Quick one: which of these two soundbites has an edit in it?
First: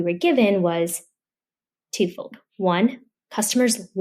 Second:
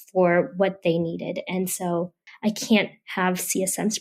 second; 1 cut; at 2.2 s

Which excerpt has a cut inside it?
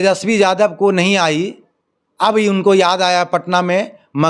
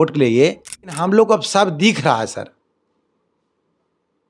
second; 1 cut; at 1.0 s

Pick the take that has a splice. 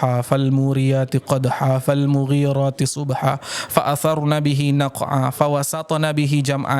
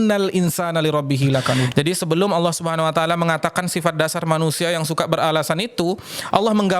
second; 1 cut; at 1.7 s

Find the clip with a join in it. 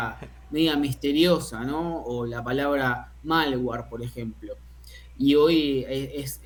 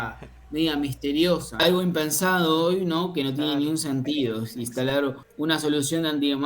second; 2 cuts; at 1.6 s, 5.2 s

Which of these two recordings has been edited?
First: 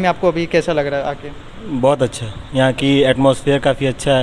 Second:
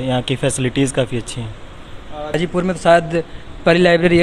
second; 1 cut; at 2.3 s

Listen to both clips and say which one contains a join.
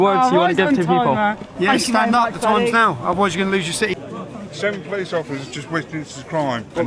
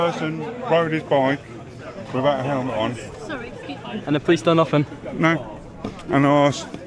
first; 1 cut; at 3.9 s

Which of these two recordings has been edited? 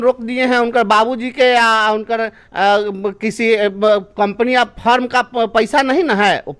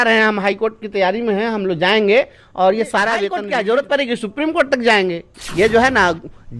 second; 2 cuts; at 3.4 s, 5.3 s

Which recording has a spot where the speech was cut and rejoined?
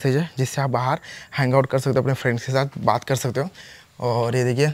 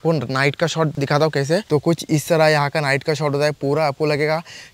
second; 1 cut; at 1.3 s

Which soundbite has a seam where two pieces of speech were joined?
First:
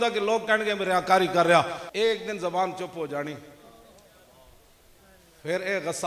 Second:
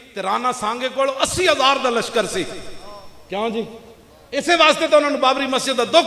first; 1 cut; at 1.8 s

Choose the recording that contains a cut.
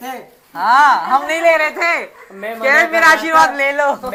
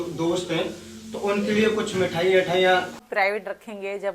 second; 1 cut; at 3.0 s

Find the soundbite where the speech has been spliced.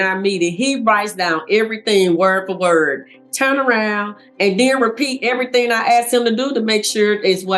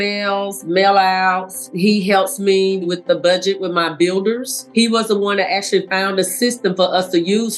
second; 3 cuts; at 1.6 s, 2.8 s, 4.6 s

